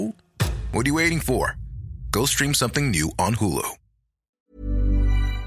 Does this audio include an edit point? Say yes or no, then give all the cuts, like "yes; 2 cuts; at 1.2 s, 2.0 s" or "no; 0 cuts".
yes; 1 cut; at 4.4 s